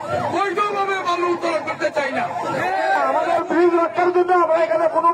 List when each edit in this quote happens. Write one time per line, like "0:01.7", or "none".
0:03.1